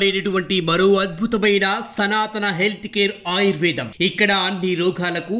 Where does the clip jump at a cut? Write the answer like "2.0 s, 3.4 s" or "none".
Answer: none